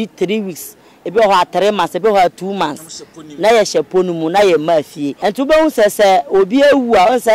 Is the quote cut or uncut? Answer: cut